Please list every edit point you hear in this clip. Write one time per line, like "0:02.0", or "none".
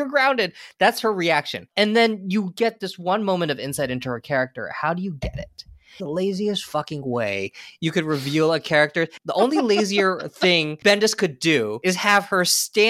0:01.6
0:05.9
0:09.1
0:10.7
0:11.8